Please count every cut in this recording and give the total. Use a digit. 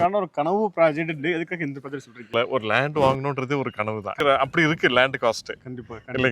2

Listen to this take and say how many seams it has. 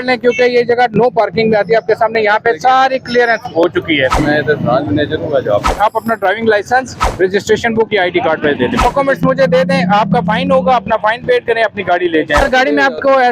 5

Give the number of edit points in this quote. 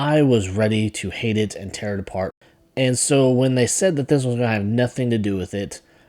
1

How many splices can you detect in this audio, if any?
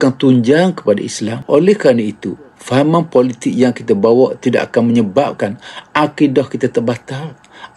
1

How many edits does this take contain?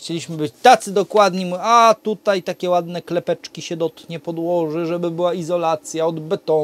0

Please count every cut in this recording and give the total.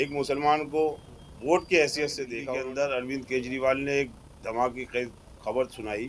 1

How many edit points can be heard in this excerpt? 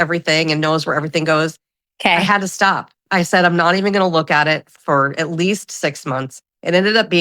2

